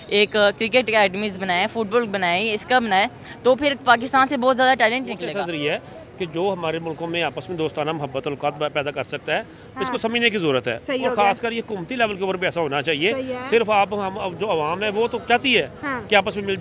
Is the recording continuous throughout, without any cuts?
no; 1 cut; at 5.2 s

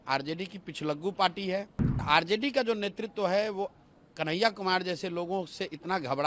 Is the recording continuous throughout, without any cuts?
no; 1 cut; at 2.0 s

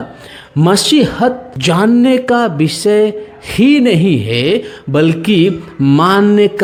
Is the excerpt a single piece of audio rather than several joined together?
yes; 0 cuts

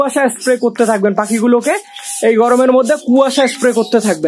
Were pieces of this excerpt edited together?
no; 0 cuts

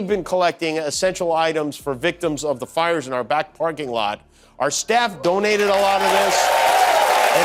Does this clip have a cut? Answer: no; 0 cuts

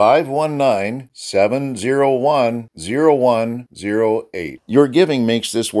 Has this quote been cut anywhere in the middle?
no; 0 cuts

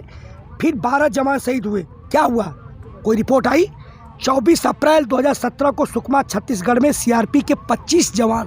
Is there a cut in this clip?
no; 0 cuts

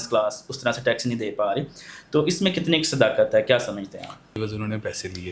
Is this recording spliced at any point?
yes; 1 cut; at 4.3 s

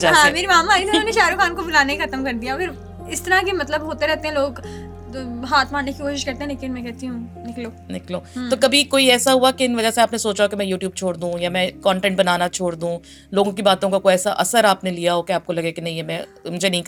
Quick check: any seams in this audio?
no; 0 cuts

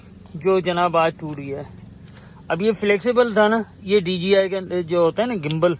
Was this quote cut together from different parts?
no; 0 cuts

